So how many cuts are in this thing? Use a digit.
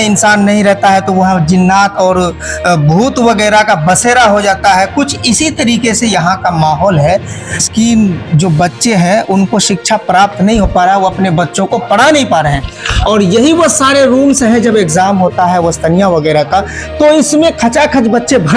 1